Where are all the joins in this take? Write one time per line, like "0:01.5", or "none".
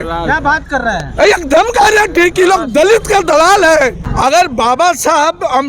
0:04.1